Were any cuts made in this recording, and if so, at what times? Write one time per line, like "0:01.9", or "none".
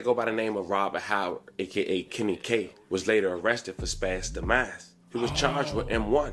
none